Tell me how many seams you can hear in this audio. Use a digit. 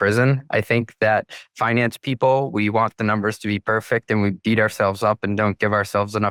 0